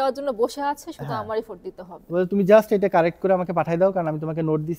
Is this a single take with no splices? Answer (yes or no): yes